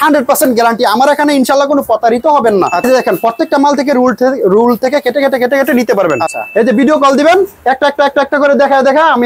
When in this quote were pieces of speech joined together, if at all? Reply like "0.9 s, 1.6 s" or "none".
2.9 s, 6.3 s